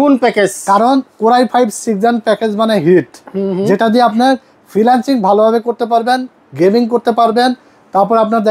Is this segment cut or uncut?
uncut